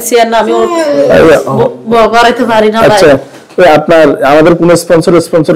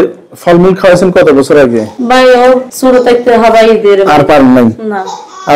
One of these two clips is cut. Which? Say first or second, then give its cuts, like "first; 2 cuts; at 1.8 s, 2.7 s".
second; 2 cuts; at 1.9 s, 2.7 s